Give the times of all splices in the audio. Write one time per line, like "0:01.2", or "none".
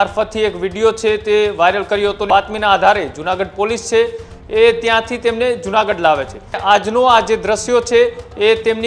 0:02.2
0:06.6